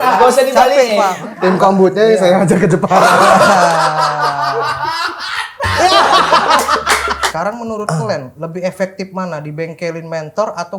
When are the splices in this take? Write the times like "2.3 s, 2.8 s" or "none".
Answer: 1.2 s, 7.2 s, 8.3 s